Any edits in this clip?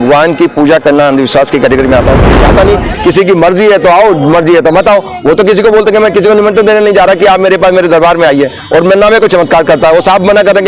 yes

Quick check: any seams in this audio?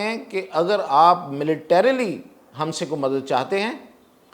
no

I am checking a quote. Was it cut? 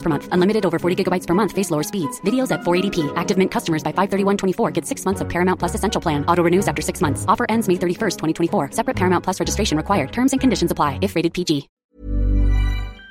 yes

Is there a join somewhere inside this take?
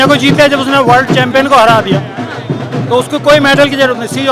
no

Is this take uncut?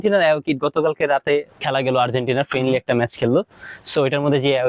no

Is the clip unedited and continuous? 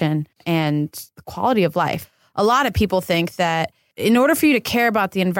no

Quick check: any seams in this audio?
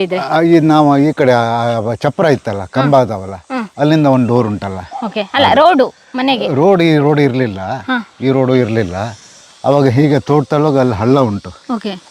no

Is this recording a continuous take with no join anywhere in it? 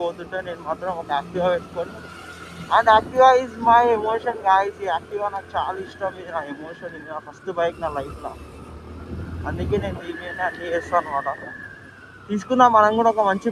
yes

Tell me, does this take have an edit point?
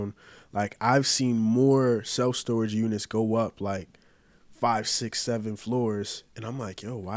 no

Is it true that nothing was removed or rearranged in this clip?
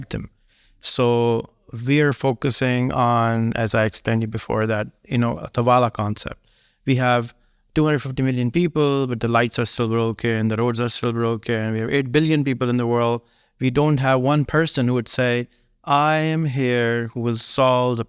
yes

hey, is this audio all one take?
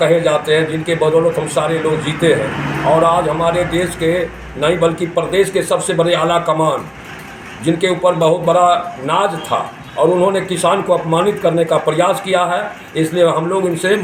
yes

